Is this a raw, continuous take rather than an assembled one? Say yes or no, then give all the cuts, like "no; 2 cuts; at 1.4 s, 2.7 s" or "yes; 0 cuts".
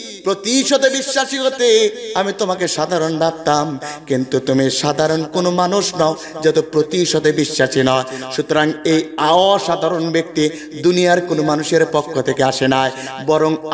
yes; 0 cuts